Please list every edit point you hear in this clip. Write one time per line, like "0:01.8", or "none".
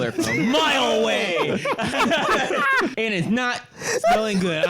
0:02.9